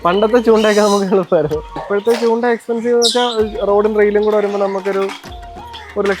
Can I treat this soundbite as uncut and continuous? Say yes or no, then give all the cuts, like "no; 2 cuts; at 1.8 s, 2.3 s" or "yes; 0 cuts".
no; 1 cut; at 1.8 s